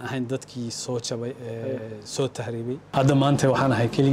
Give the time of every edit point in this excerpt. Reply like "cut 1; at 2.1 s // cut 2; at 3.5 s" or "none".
cut 1; at 2.8 s